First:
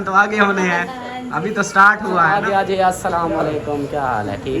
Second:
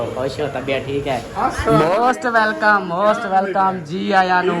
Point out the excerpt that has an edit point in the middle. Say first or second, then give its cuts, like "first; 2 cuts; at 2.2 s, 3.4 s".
first; 1 cut; at 2.4 s